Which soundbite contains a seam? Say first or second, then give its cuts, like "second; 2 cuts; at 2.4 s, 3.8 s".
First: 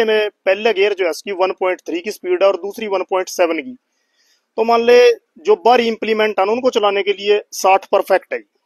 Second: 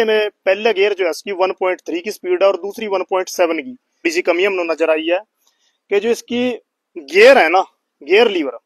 second; 1 cut; at 4.0 s